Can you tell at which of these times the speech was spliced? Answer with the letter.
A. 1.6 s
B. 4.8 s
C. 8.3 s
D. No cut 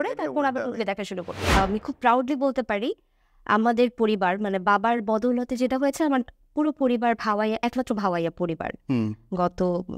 A